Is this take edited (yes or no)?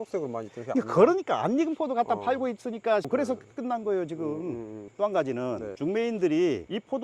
yes